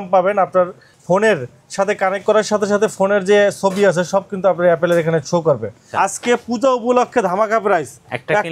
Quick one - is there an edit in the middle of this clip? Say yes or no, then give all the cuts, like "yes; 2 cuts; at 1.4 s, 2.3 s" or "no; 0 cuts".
yes; 1 cut; at 5.8 s